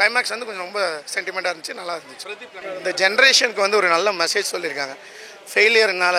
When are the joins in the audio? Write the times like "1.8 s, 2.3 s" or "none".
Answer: none